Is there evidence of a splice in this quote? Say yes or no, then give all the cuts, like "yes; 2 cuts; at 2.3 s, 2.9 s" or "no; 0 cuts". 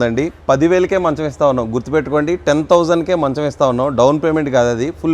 no; 0 cuts